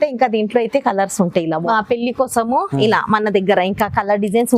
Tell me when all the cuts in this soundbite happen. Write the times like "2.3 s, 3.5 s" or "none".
1.7 s